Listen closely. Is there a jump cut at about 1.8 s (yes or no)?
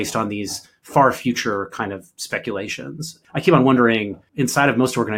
no